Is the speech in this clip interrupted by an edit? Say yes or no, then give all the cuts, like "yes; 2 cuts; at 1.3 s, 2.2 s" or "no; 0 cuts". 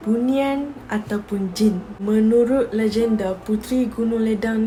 no; 0 cuts